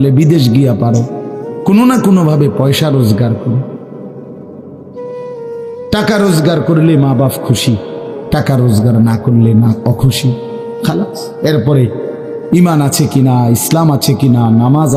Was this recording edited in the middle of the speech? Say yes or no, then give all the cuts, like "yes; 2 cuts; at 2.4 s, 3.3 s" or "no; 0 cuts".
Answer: no; 0 cuts